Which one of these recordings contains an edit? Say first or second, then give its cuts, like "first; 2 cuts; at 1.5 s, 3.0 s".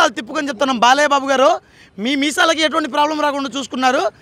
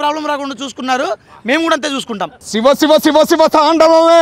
second; 1 cut; at 2.4 s